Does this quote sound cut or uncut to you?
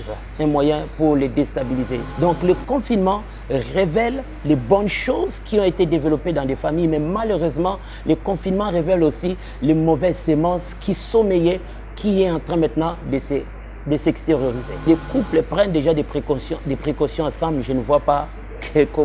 cut